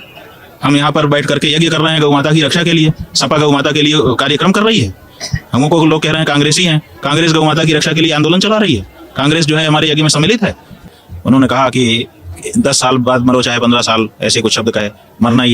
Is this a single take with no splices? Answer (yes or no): no